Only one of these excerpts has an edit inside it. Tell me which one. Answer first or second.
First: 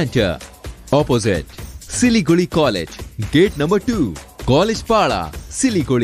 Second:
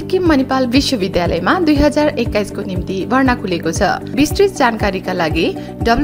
second